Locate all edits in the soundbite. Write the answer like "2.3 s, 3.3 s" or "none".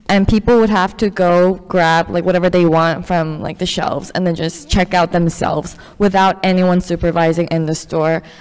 none